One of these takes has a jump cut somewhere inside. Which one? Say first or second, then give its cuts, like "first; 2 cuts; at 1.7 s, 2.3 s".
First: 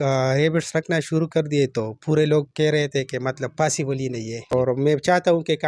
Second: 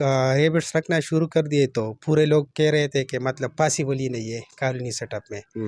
first; 1 cut; at 4.4 s